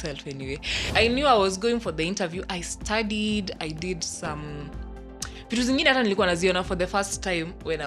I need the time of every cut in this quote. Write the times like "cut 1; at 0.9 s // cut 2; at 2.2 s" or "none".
cut 1; at 0.9 s